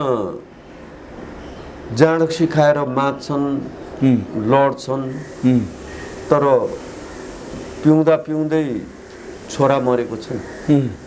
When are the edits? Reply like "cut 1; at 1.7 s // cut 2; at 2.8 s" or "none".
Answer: none